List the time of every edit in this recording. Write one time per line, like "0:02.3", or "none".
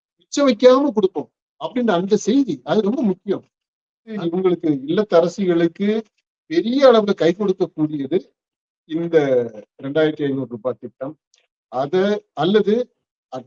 0:04.2